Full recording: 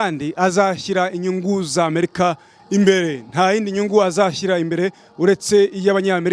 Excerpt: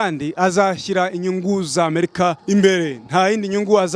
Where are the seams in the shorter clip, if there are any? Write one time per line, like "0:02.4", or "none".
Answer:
0:02.4